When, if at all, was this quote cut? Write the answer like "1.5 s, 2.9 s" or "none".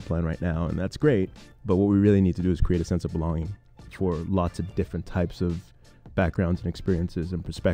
none